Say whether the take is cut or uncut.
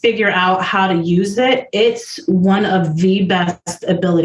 uncut